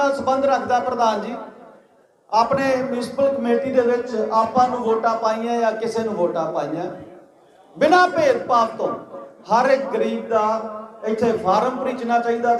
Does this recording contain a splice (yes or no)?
no